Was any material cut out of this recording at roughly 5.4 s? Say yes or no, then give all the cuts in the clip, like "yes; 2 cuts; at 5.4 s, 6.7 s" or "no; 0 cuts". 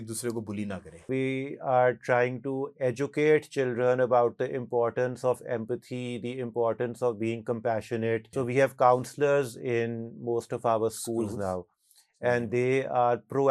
no; 2 cuts; at 1.1 s, 8.3 s